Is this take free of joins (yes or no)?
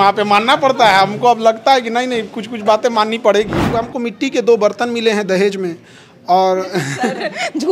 no